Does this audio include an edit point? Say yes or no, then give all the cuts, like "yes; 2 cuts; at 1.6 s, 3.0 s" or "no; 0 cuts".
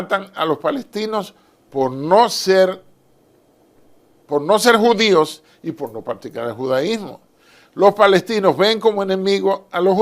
no; 0 cuts